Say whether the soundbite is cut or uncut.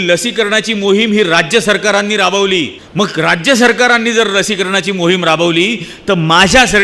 cut